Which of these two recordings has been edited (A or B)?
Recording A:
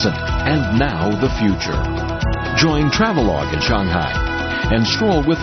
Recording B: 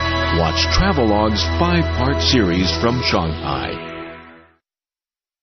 B